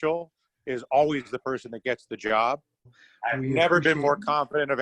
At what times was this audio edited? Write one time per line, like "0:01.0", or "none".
0:03.0